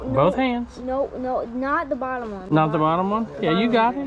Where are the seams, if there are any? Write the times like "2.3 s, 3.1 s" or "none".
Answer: none